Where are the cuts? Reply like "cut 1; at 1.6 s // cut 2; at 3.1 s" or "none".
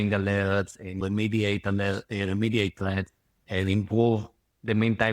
cut 1; at 1.0 s // cut 2; at 3.4 s